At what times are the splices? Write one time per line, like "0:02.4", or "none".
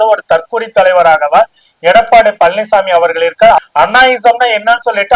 0:03.6